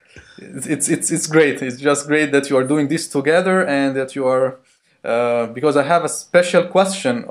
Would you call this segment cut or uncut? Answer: cut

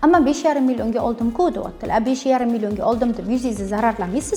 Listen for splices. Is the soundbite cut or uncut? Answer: uncut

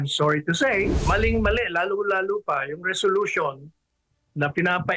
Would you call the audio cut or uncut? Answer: cut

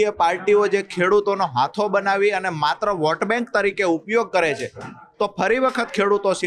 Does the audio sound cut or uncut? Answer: uncut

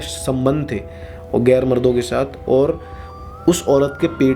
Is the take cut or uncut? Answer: uncut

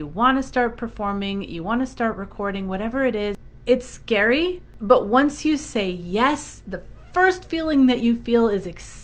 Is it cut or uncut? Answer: cut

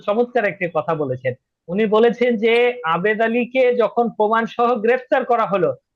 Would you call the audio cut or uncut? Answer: uncut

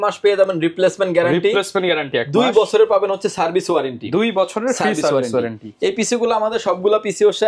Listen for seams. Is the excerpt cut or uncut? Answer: uncut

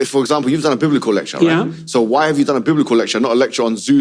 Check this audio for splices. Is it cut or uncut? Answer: uncut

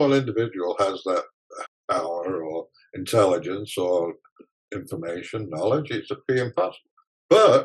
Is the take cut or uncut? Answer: cut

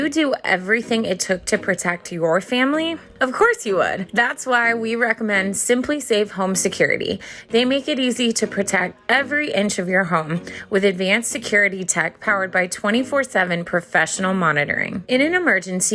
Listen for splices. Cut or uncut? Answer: cut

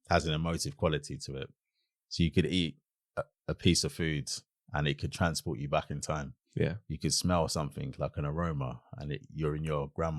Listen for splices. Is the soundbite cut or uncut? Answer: uncut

